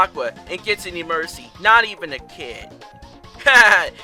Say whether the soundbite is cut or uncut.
uncut